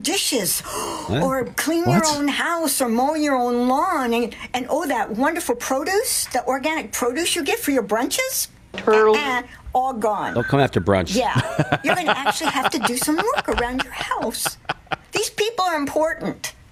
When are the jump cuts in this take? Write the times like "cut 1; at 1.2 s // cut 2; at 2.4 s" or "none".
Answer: none